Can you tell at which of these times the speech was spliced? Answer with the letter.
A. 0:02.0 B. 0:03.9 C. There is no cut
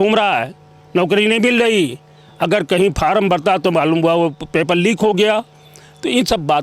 C